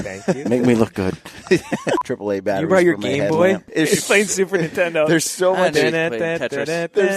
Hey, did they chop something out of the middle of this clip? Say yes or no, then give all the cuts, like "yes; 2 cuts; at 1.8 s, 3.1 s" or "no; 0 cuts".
yes; 2 cuts; at 2.0 s, 3.7 s